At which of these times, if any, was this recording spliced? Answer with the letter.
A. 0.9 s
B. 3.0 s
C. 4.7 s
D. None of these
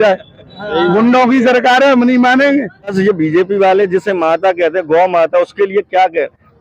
B